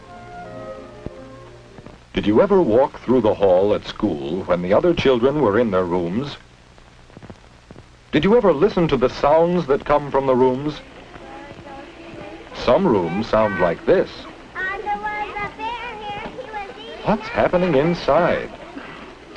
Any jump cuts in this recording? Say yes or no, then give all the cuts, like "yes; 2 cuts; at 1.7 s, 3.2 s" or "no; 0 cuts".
yes; 1 cut; at 9.8 s